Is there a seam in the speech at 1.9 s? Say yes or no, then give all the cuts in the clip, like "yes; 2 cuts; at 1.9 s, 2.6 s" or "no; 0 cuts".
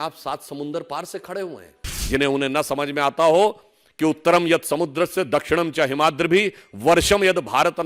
yes; 1 cut; at 1.9 s